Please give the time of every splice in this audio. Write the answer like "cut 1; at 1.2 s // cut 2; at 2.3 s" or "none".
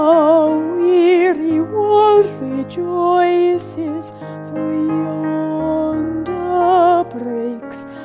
none